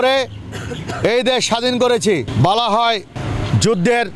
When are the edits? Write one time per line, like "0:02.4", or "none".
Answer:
0:02.3
0:03.2